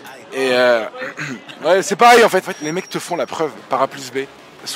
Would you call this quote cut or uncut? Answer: uncut